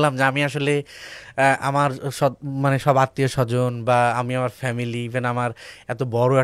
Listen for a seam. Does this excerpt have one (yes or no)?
no